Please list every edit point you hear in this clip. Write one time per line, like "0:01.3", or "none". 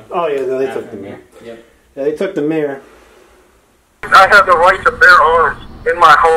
0:04.1